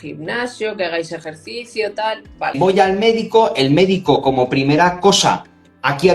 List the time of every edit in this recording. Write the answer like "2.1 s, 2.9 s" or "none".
2.6 s